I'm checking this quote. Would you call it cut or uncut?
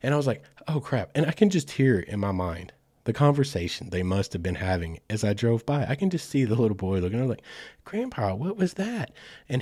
uncut